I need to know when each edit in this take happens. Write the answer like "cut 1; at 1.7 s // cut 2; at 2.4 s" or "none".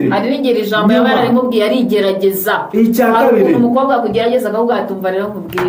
none